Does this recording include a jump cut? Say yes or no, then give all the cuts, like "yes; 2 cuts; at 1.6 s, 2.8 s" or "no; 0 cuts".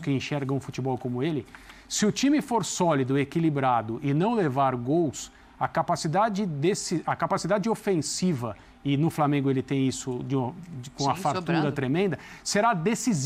no; 0 cuts